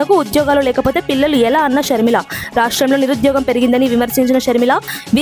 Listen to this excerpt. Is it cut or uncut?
uncut